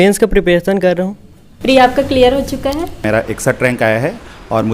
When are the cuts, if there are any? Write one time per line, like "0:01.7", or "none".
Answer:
0:03.0